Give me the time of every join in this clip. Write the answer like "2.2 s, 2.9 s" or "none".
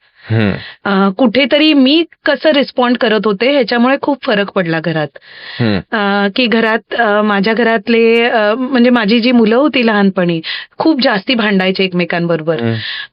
none